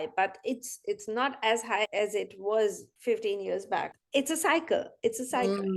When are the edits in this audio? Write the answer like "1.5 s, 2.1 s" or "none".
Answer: 1.9 s, 2.9 s, 3.9 s